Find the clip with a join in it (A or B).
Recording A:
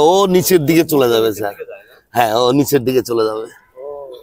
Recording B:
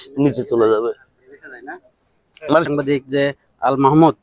B